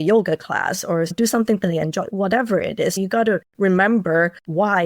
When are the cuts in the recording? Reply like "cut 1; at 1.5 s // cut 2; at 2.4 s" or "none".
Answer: cut 1; at 1.1 s // cut 2; at 3.0 s